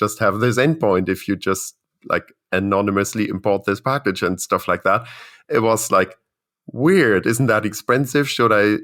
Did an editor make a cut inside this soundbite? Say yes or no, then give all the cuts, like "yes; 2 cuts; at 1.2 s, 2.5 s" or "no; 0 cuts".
no; 0 cuts